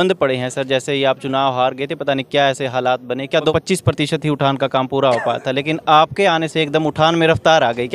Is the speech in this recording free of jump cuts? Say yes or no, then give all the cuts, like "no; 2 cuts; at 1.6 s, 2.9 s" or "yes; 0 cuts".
no; 1 cut; at 3.5 s